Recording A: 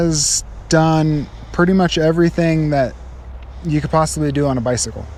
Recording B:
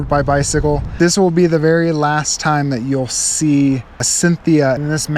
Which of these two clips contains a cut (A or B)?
B